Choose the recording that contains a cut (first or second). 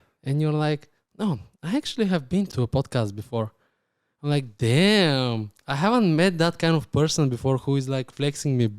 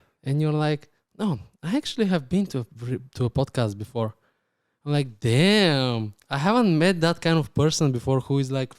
first